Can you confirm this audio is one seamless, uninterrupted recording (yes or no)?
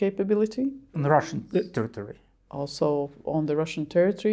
no